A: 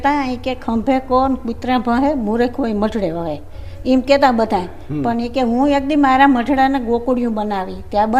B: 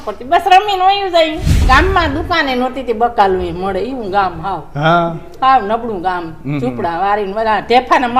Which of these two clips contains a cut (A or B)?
B